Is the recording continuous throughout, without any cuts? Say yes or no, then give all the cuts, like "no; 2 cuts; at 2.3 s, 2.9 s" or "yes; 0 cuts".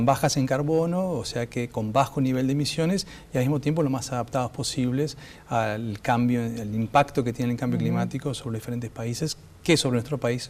yes; 0 cuts